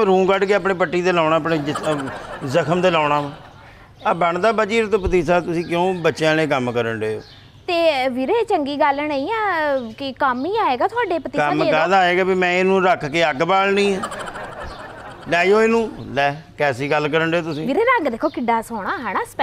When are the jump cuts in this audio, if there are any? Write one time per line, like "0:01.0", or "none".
none